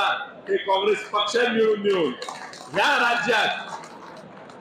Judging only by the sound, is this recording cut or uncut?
uncut